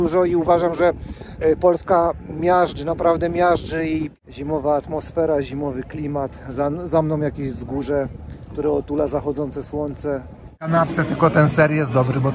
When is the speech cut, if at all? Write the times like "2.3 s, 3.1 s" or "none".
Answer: 4.1 s, 10.7 s